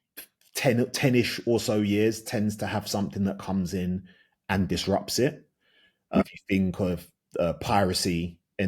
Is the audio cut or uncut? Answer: cut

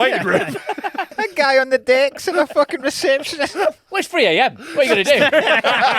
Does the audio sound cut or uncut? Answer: cut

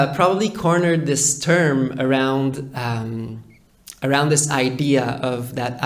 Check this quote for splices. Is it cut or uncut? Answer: uncut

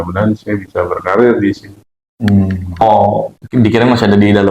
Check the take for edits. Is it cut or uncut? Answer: cut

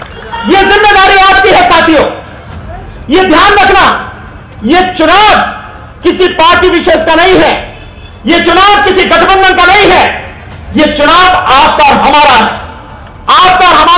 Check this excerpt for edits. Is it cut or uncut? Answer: uncut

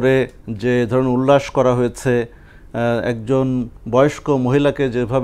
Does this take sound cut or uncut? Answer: uncut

